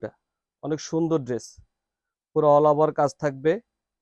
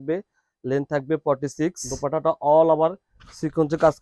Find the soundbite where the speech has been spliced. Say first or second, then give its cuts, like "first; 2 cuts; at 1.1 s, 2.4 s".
second; 1 cut; at 1.9 s